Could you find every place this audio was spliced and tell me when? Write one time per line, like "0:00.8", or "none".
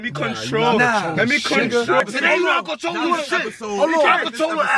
0:02.0